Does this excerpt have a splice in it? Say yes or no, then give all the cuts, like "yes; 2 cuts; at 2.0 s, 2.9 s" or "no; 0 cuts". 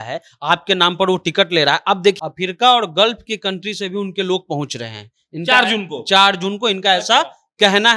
yes; 1 cut; at 2.2 s